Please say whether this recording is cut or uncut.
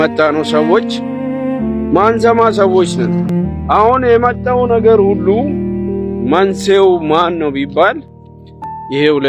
cut